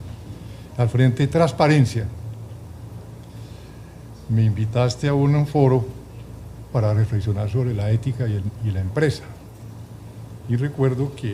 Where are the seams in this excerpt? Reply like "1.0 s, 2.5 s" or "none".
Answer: 8.2 s